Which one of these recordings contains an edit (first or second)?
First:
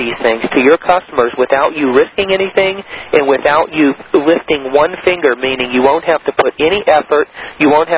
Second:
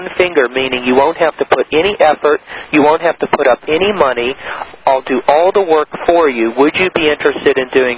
second